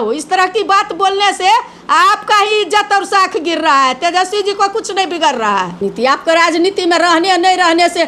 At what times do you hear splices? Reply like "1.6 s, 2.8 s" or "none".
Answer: 5.8 s